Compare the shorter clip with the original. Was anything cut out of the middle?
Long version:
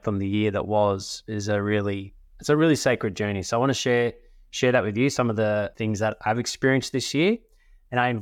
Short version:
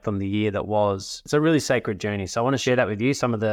yes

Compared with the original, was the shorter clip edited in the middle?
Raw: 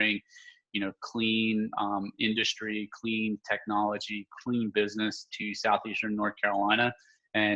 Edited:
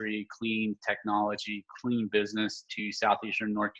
no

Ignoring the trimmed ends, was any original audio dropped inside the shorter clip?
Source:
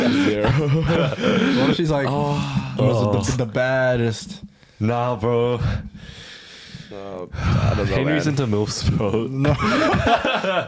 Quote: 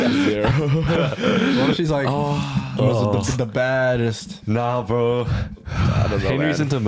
yes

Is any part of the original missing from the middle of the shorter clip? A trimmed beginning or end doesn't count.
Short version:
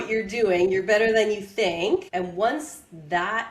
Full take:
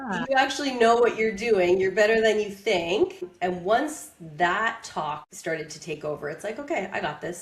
yes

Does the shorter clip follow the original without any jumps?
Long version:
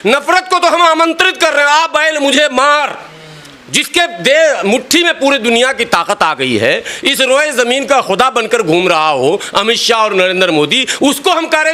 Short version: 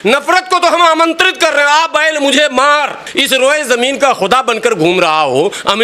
no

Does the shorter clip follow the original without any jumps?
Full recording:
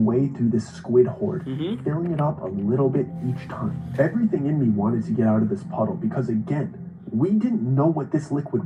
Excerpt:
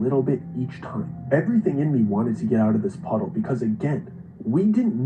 yes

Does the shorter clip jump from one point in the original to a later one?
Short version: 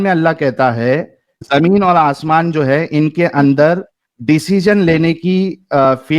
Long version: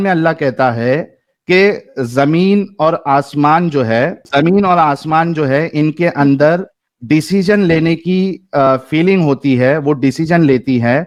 yes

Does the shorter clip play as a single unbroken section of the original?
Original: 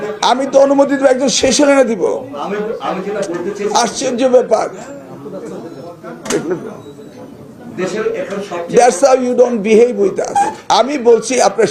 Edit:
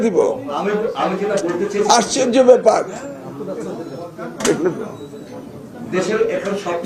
yes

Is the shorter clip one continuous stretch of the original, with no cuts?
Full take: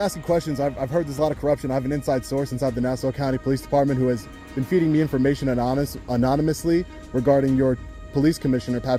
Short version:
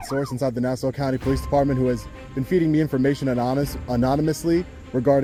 yes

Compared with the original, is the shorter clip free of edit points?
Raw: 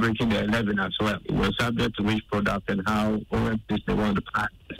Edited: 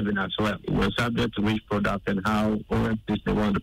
yes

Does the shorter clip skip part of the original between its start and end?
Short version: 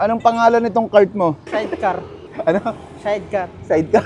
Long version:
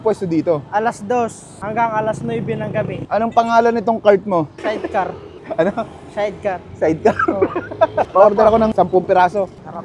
no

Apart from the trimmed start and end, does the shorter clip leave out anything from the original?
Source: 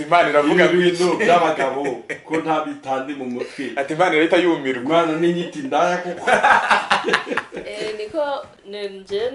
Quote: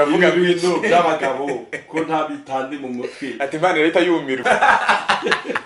yes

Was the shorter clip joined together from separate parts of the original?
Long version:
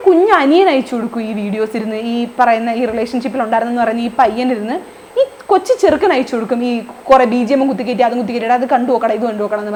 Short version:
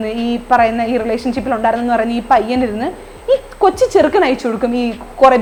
no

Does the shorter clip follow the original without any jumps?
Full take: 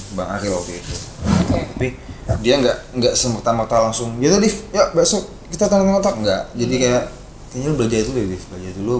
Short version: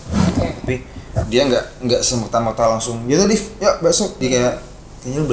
no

